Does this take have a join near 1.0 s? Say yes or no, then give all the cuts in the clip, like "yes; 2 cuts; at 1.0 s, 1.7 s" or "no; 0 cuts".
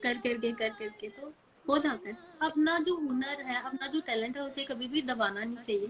no; 1 cut; at 2.4 s